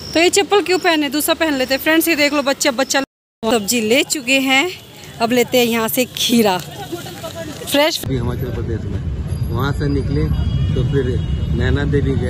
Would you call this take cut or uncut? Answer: cut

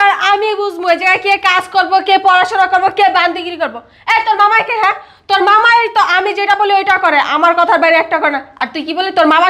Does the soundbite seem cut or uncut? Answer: uncut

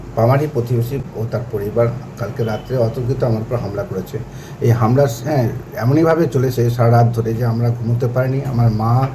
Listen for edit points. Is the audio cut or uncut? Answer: cut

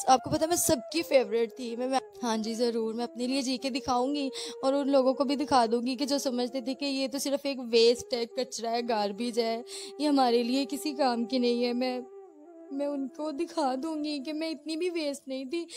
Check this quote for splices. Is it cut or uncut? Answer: cut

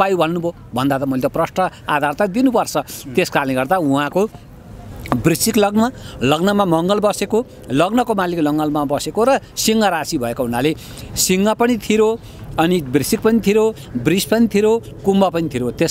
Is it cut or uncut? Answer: uncut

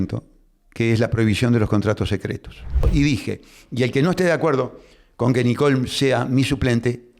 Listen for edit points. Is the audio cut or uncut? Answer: cut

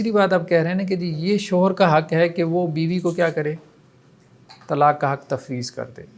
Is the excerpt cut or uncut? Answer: uncut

